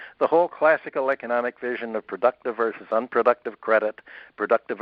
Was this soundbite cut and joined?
no; 0 cuts

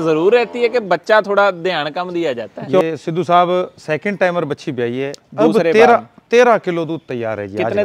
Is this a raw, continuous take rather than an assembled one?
no; 1 cut; at 2.8 s

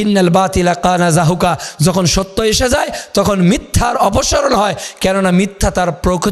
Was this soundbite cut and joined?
no; 0 cuts

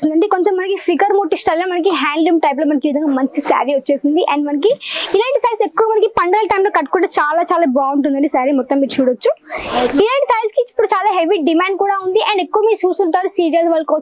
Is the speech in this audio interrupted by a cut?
no; 0 cuts

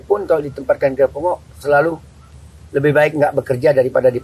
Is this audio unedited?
yes; 0 cuts

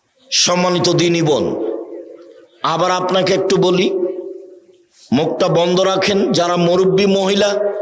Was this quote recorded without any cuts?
yes; 0 cuts

